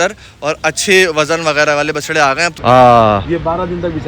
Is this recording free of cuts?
no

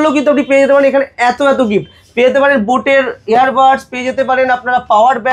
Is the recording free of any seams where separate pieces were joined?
yes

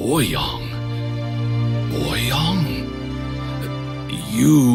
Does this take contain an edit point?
no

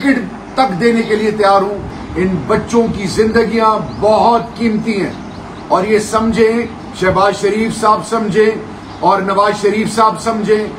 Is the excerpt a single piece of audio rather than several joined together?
no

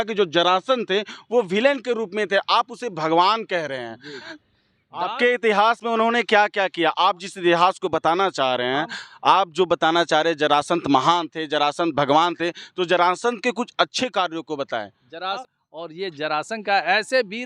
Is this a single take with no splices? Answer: no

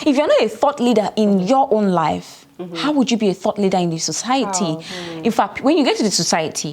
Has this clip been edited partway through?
no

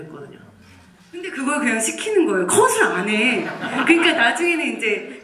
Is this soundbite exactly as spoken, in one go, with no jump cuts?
yes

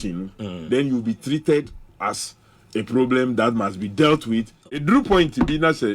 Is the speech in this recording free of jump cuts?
no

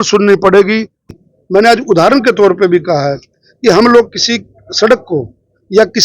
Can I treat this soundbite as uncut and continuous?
no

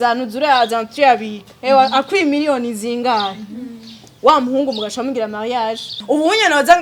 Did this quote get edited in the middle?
yes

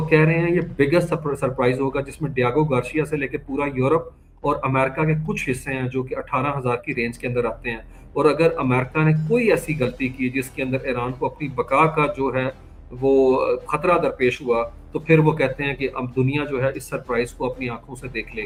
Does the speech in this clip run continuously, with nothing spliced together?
yes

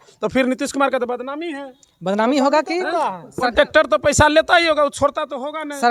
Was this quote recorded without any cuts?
yes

